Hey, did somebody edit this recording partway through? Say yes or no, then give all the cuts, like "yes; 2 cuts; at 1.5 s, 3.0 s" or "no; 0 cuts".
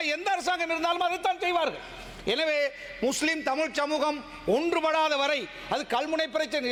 no; 0 cuts